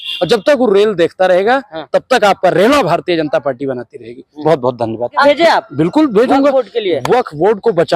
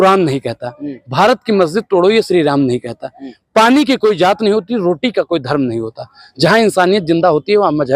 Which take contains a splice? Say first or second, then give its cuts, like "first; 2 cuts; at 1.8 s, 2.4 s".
first; 1 cut; at 5.2 s